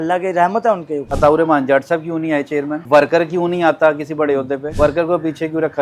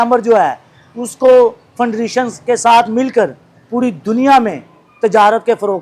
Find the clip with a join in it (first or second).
first